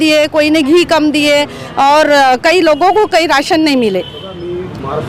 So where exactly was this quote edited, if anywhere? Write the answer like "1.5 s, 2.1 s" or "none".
none